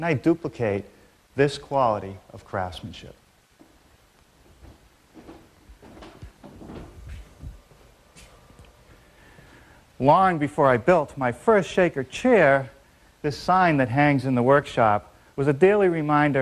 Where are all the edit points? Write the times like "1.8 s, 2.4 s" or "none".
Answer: none